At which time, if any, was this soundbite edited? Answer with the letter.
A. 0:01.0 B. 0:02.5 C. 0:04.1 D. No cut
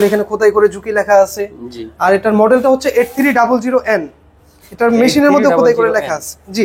D